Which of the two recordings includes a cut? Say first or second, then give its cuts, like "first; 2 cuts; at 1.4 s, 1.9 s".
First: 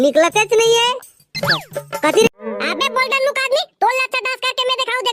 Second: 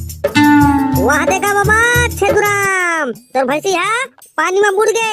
first; 1 cut; at 2.3 s